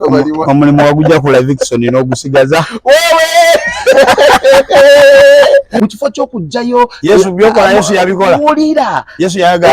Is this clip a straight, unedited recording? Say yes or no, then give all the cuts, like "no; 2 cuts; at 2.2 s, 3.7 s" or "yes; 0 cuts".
no; 1 cut; at 5.7 s